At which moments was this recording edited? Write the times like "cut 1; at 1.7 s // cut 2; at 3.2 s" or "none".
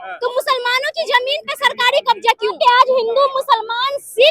cut 1; at 2.6 s